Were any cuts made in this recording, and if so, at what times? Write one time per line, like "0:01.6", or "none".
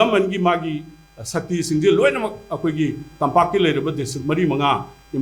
none